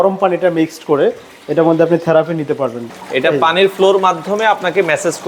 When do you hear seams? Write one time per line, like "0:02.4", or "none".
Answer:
0:02.9